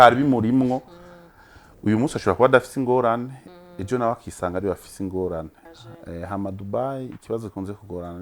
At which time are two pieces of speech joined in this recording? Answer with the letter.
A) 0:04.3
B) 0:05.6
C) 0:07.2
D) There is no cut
B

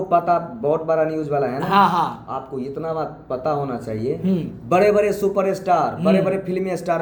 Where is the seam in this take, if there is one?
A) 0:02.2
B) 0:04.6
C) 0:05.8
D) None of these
D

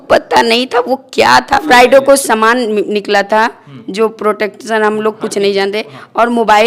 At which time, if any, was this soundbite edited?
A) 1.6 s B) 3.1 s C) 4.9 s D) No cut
A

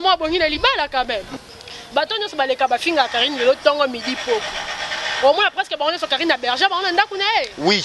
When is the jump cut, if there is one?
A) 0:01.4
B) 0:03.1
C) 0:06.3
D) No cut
A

